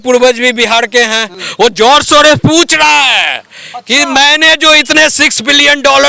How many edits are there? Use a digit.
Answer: 1